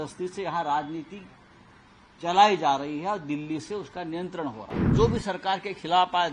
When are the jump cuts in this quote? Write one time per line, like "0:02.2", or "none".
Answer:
0:04.9